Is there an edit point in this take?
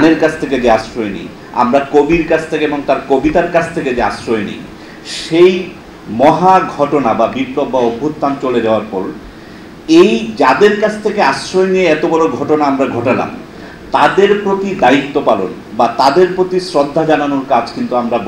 no; 0 cuts

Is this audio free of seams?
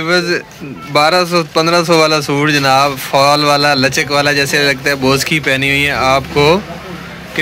yes; 0 cuts

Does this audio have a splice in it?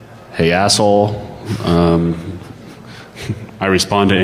no; 0 cuts

